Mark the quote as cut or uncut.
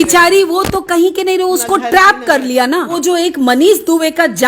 cut